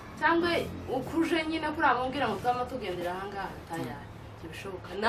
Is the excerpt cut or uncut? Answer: uncut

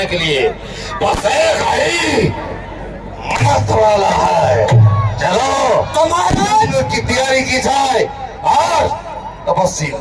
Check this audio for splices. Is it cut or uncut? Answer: uncut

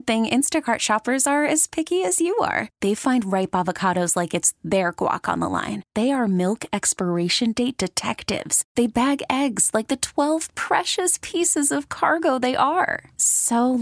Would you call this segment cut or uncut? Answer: uncut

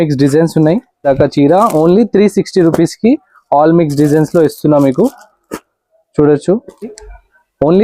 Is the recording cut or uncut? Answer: cut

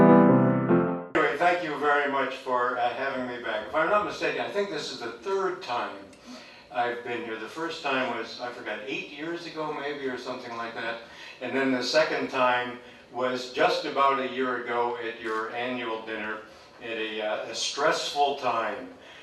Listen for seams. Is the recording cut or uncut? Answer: cut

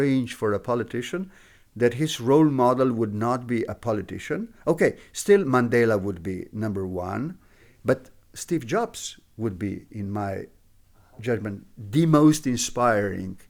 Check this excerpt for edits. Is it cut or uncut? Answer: uncut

